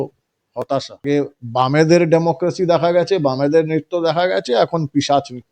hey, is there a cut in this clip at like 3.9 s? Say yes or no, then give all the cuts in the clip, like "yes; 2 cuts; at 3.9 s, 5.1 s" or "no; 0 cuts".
no; 1 cut; at 0.9 s